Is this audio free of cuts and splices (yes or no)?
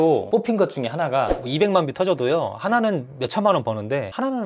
no